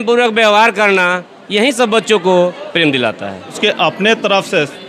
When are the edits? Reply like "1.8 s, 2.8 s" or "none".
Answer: 3.6 s